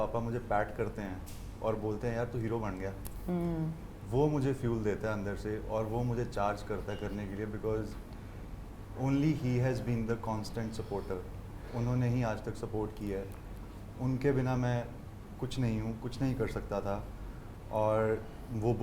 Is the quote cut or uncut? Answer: uncut